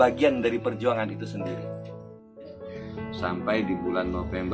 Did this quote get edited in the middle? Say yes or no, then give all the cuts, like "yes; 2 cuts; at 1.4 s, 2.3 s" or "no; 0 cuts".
yes; 1 cut; at 2.6 s